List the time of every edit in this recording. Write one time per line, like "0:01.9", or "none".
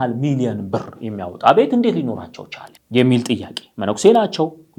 none